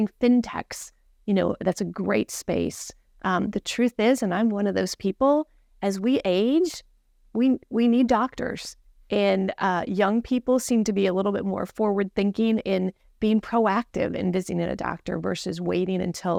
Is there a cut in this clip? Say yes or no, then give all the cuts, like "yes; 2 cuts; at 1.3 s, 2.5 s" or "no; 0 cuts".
no; 0 cuts